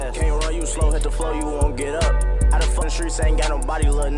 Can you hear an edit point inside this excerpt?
yes; 1 cut; at 2.8 s

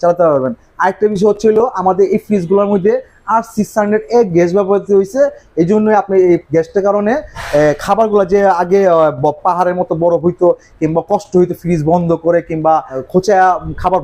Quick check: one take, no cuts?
no; 1 cut; at 13.0 s

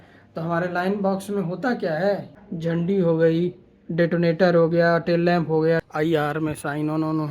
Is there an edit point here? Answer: yes; 2 cuts; at 2.3 s, 5.8 s

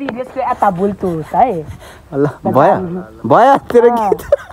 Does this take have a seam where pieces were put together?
no; 0 cuts

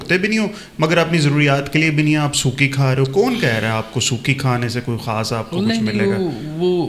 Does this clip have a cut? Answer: no; 0 cuts

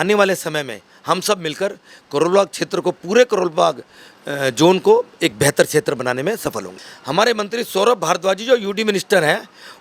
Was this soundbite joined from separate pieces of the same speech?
yes; 1 cut; at 6.7 s

